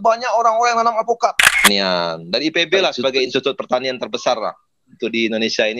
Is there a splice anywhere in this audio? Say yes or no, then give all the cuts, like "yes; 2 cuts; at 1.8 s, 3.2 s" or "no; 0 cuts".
yes; 2 cuts; at 1.6 s, 3.3 s